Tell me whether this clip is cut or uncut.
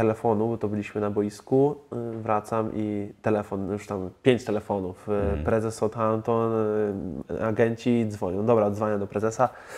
uncut